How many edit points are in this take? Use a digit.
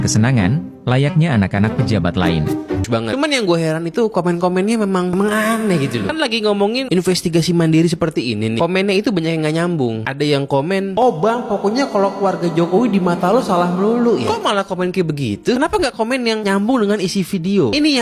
1